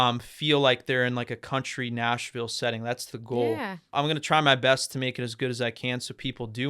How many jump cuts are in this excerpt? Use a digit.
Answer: 1